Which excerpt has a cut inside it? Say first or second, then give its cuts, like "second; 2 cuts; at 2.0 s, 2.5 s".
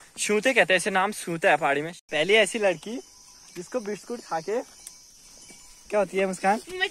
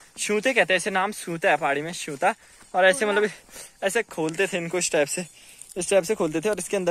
first; 1 cut; at 2.0 s